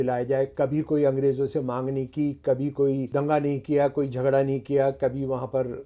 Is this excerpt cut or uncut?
cut